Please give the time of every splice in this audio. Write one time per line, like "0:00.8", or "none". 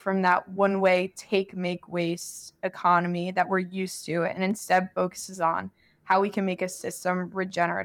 none